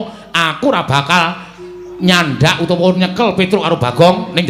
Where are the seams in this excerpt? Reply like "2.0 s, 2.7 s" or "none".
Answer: none